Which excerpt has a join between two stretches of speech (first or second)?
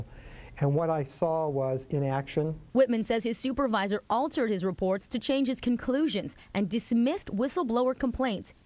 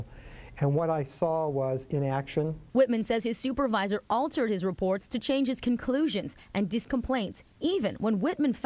second